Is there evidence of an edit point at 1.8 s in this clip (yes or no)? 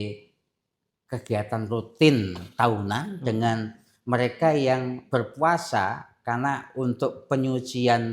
no